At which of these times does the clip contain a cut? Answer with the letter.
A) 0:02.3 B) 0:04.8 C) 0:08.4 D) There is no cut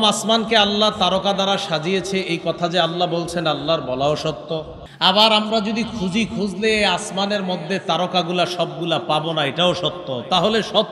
B